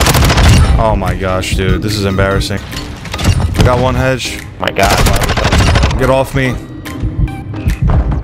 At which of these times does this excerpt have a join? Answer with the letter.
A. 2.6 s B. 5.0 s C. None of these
A